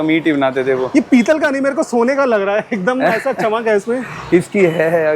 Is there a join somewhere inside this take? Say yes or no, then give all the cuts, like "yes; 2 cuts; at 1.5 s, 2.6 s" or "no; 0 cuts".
no; 0 cuts